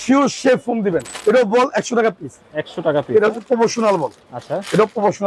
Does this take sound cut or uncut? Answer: cut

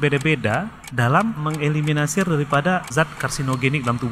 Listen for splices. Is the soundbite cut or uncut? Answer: cut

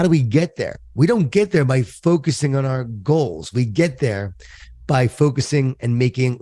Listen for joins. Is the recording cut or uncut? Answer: uncut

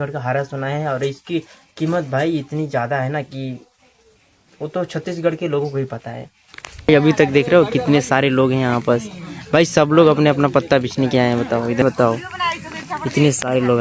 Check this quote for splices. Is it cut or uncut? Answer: cut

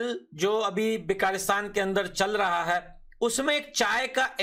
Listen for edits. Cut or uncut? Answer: uncut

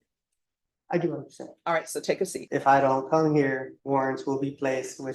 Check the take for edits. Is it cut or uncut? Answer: cut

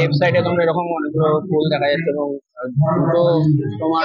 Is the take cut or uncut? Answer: uncut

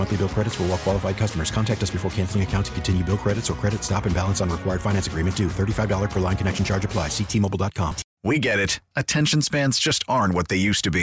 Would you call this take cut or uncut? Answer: cut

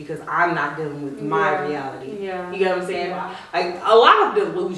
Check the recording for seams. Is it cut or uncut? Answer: cut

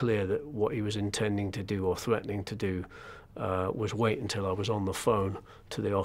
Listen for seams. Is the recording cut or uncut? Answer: uncut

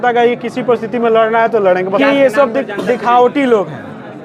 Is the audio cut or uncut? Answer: cut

